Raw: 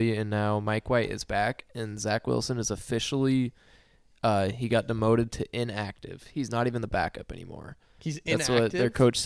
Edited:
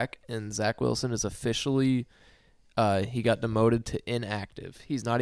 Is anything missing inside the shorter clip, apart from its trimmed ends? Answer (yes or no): no